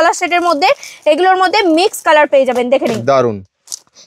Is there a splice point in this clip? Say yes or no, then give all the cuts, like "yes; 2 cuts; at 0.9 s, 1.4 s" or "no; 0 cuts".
no; 0 cuts